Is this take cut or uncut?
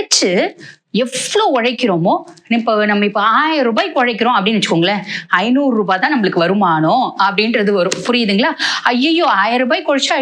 uncut